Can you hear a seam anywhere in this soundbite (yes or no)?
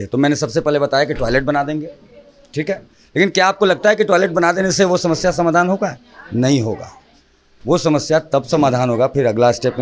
no